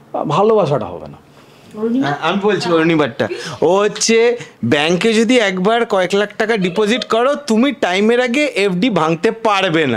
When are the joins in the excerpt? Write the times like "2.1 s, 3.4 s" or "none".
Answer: none